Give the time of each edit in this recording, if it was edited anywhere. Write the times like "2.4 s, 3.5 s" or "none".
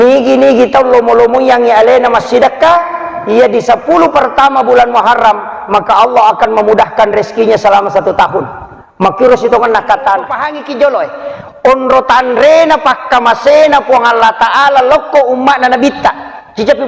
10.6 s

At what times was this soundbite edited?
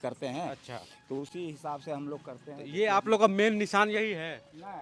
none

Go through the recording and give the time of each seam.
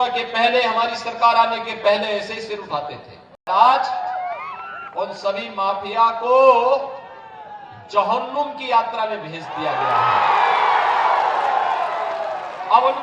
3.5 s

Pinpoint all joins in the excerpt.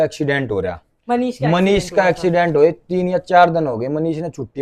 none

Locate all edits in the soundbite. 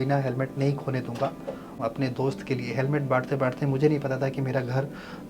1.7 s

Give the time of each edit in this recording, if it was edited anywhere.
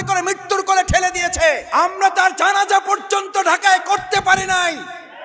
1.6 s

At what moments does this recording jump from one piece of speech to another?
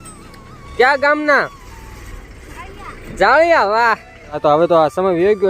4.3 s

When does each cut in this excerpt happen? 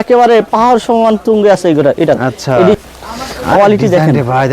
2.8 s

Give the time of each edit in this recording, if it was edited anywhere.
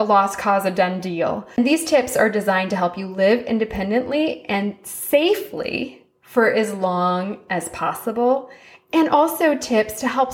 1.6 s

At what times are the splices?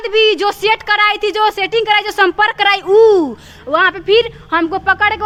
none

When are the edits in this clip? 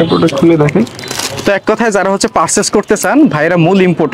none

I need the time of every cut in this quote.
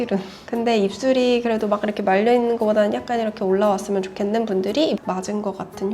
5.0 s

